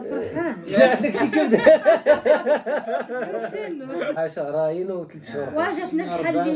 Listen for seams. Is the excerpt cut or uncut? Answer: cut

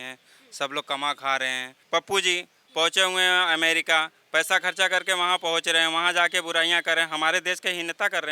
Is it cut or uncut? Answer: cut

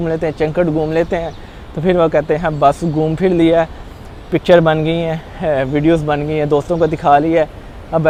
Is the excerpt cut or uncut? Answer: uncut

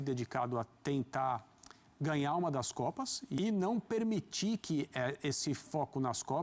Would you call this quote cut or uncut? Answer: cut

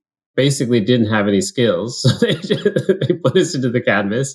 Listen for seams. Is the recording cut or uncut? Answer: uncut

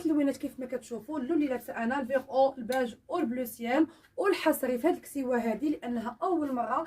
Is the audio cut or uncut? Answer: cut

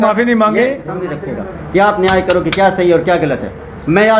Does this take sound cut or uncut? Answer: cut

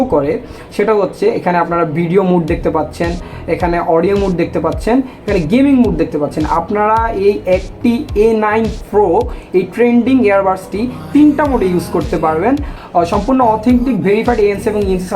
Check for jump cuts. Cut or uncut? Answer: cut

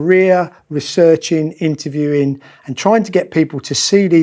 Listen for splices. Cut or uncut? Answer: uncut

